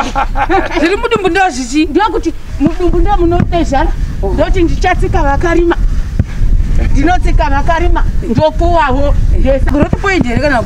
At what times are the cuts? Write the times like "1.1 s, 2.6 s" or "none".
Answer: 9.7 s